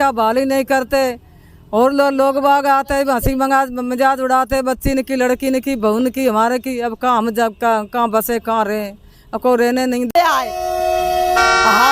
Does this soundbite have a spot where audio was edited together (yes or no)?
yes